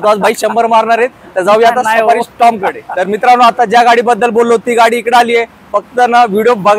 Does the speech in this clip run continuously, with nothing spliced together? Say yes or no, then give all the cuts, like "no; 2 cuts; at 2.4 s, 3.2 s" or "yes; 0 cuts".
yes; 0 cuts